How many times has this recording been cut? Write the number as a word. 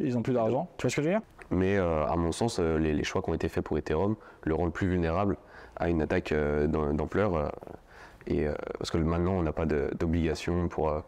one